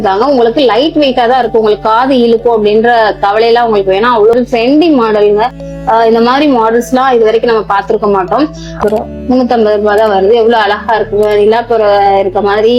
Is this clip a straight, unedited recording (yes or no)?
no